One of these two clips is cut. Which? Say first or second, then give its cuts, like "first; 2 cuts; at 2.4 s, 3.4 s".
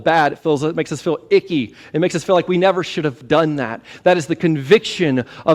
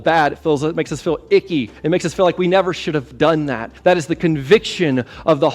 second; 2 cuts; at 1.7 s, 3.7 s